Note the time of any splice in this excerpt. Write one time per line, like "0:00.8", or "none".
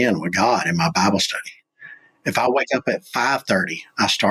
none